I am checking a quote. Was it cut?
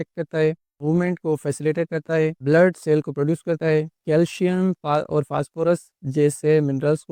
no; 0 cuts

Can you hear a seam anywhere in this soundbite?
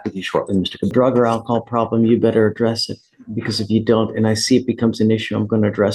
yes; 1 cut; at 0.9 s

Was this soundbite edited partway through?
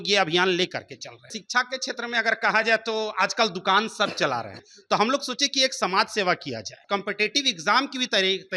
yes; 3 cuts; at 1.4 s, 4.7 s, 6.8 s

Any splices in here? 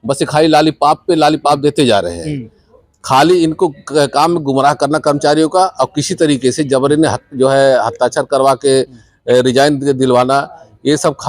no; 0 cuts

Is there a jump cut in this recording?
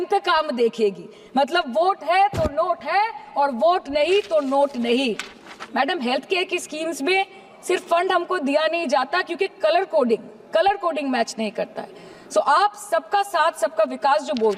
no; 0 cuts

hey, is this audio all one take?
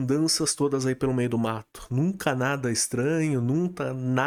yes; 0 cuts

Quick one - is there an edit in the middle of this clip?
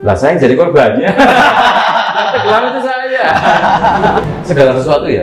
yes; 1 cut; at 4.2 s

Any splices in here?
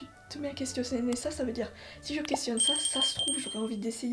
no; 0 cuts

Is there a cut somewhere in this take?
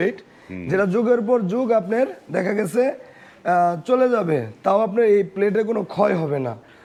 no; 0 cuts

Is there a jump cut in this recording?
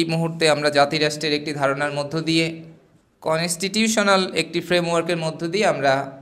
no; 0 cuts

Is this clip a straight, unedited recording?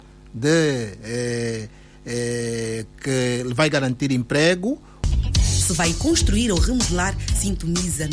no; 1 cut; at 4.9 s

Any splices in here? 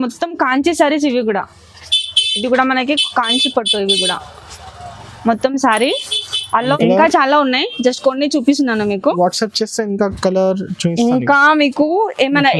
yes; 1 cut; at 6.7 s

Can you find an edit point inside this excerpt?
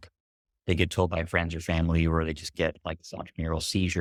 no; 0 cuts

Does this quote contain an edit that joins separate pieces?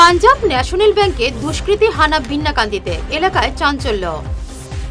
no; 0 cuts

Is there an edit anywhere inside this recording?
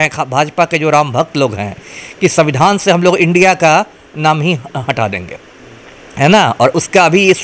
no; 0 cuts

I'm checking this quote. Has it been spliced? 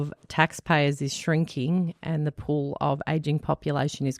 no; 0 cuts

